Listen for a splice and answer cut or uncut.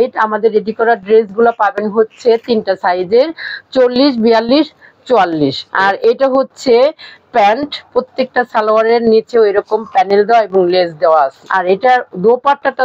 cut